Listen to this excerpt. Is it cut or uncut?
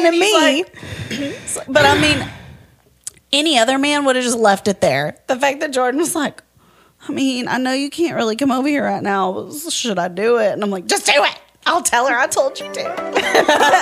uncut